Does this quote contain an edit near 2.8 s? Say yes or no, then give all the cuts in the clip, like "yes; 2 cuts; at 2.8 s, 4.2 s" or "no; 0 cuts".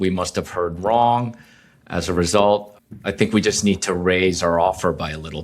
yes; 1 cut; at 2.8 s